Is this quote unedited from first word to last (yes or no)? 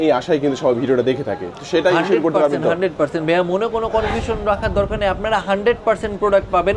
yes